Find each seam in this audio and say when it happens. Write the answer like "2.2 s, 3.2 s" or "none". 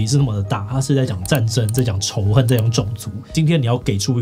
3.3 s

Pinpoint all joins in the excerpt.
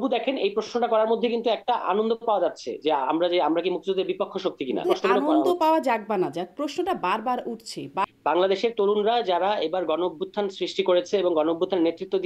4.8 s, 8.0 s

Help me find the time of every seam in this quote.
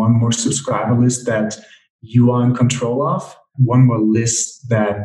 3.5 s

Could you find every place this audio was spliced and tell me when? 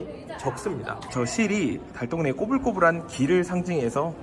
1.1 s

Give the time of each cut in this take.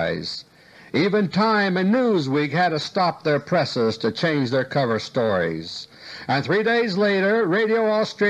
2.9 s

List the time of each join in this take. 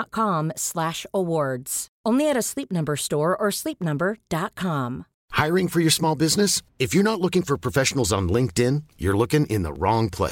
5.1 s

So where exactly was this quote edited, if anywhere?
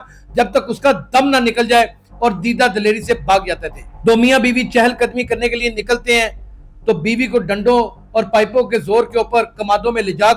3.9 s

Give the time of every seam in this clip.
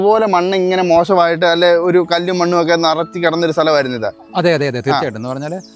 none

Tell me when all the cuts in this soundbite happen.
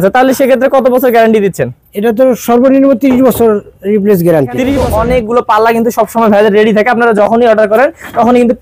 4.8 s

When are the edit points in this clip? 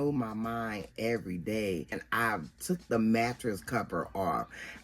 2.0 s

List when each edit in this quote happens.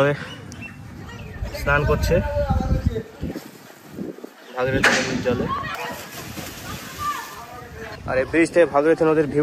5.7 s, 8.0 s

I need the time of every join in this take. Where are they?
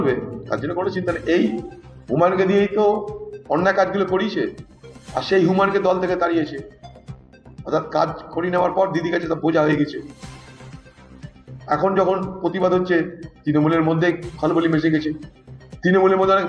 none

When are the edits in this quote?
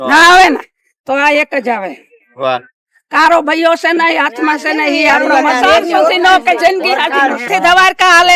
7.4 s

